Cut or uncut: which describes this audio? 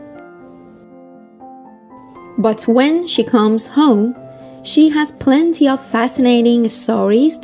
cut